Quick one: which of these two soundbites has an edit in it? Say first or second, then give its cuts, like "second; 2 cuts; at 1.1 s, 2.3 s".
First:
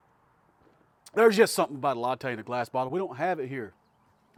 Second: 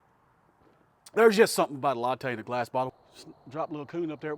second; 1 cut; at 2.9 s